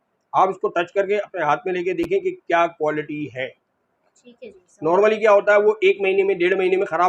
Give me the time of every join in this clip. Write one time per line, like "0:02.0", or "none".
none